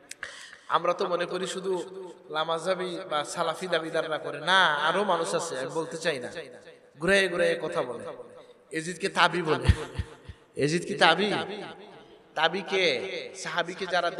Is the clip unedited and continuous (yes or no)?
yes